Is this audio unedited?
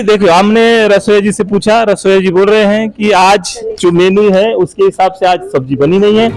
yes; 0 cuts

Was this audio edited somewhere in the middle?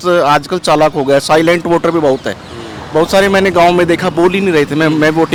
no; 0 cuts

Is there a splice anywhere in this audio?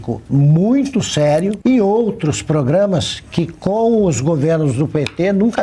yes; 1 cut; at 1.6 s

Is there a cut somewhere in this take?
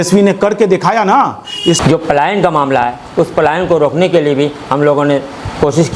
yes; 1 cut; at 1.8 s

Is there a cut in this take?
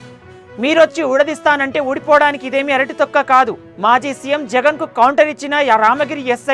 no; 0 cuts

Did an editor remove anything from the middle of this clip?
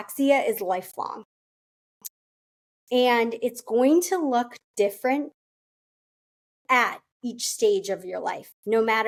no; 0 cuts

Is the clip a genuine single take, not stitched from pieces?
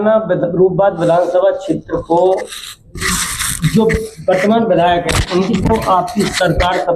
yes; 0 cuts

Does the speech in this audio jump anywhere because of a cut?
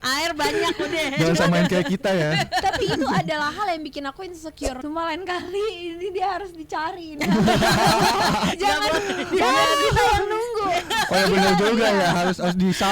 yes; 1 cut; at 4.8 s

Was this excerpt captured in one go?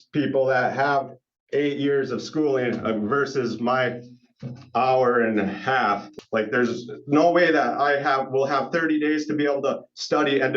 no; 1 cut; at 6.1 s

